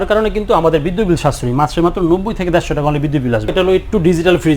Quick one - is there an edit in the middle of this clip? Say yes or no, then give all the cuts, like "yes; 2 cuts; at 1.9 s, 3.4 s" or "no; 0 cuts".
yes; 1 cut; at 3.5 s